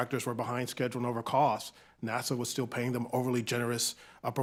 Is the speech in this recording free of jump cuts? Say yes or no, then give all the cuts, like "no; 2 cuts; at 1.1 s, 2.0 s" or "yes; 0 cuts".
yes; 0 cuts